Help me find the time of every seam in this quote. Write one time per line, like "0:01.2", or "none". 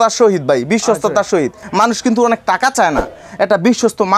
0:01.6